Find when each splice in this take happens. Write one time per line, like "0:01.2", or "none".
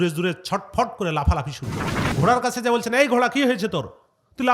0:02.2